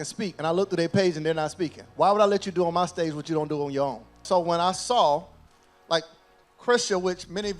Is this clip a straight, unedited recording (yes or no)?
no